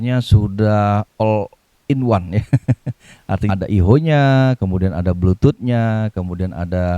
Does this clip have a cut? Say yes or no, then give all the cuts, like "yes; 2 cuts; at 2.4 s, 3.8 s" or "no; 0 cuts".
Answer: yes; 1 cut; at 3.5 s